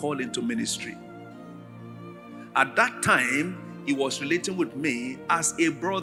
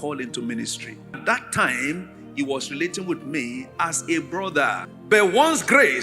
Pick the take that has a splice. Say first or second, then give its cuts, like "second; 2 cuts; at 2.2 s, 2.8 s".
second; 2 cuts; at 1.2 s, 4.9 s